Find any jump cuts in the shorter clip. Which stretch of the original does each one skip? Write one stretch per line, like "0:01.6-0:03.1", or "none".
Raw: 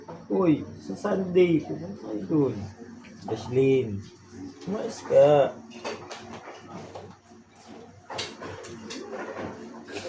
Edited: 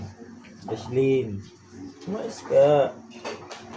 none